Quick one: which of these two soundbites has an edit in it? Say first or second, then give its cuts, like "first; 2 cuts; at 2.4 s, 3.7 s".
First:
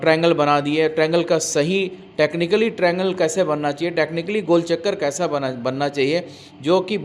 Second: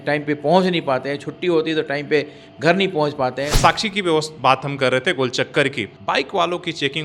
second; 2 cuts; at 3.5 s, 5.8 s